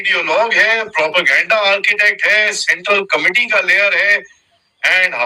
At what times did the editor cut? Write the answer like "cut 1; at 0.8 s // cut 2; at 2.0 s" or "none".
none